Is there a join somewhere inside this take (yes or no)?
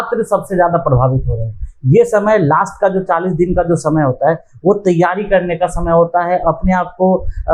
no